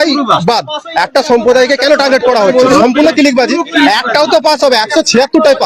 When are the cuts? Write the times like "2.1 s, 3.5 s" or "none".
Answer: 2.7 s